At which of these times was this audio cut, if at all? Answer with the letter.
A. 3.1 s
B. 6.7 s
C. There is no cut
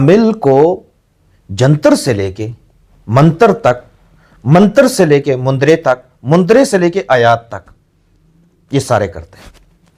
C